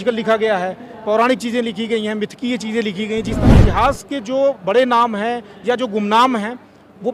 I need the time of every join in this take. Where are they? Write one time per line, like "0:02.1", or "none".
0:03.5

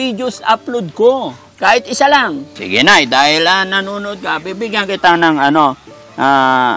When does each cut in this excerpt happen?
0:02.6

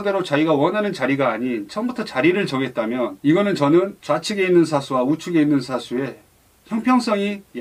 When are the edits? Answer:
none

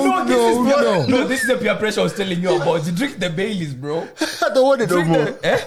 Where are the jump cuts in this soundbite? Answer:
none

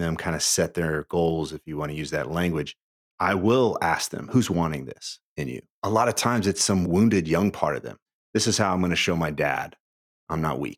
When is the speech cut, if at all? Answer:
0:03.1
0:04.3
0:05.8
0:06.8
0:08.1

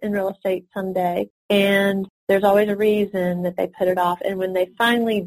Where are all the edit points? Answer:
0:01.4
0:02.1
0:03.7

